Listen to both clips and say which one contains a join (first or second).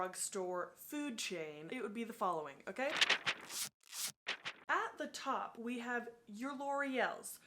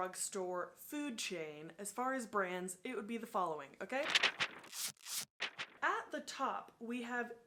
first